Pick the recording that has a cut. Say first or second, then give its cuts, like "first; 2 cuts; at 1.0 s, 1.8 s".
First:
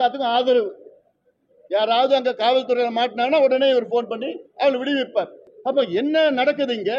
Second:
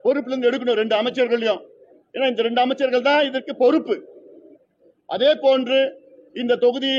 first; 1 cut; at 5.4 s